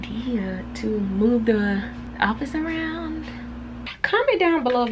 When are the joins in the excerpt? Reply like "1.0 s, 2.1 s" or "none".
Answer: 2.0 s, 3.9 s